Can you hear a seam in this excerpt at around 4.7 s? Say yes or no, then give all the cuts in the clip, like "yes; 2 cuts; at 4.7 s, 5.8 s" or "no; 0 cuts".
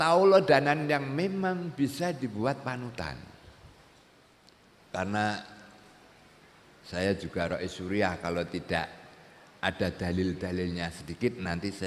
yes; 1 cut; at 4.7 s